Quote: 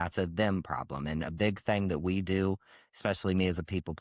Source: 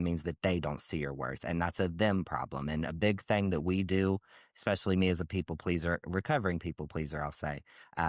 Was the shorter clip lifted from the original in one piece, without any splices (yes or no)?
yes